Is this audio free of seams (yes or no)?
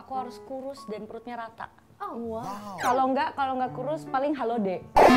no